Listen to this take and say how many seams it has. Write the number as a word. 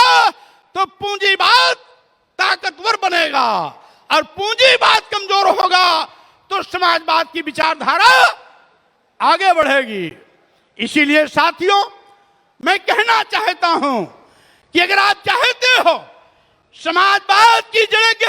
zero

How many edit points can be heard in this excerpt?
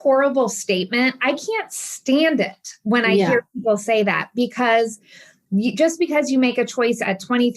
one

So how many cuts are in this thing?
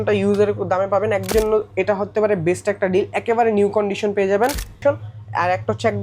two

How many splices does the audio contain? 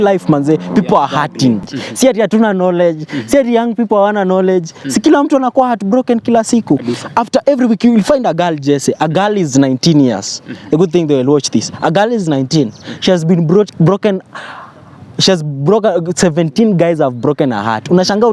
one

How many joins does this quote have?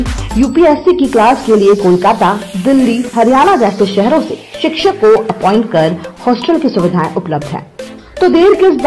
zero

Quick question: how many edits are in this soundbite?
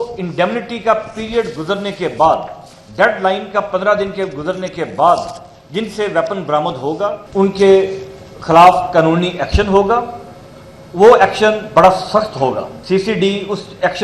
two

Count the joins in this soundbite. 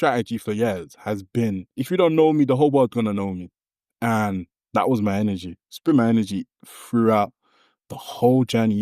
one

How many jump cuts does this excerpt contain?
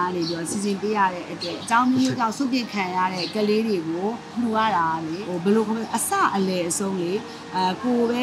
four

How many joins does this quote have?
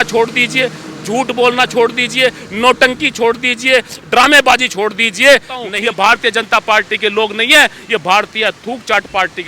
one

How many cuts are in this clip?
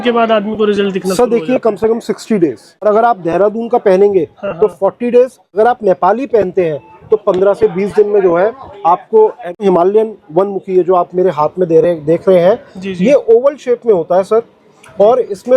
three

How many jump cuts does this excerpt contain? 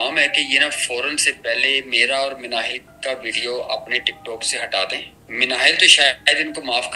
one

